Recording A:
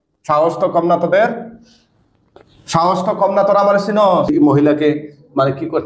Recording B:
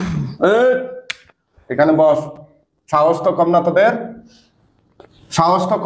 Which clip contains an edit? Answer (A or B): A